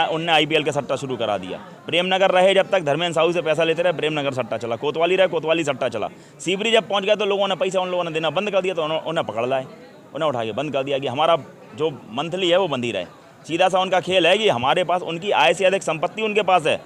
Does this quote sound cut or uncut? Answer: uncut